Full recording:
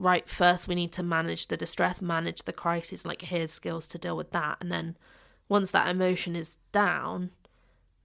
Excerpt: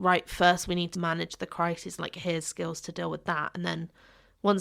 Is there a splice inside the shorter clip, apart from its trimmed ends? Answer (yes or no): yes